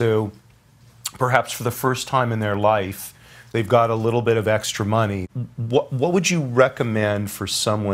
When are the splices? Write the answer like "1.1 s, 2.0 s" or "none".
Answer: 5.2 s